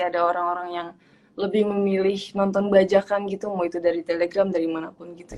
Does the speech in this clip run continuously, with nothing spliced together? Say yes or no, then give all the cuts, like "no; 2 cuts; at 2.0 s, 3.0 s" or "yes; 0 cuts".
yes; 0 cuts